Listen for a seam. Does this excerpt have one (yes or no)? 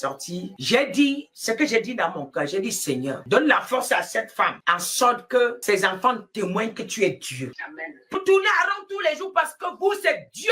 yes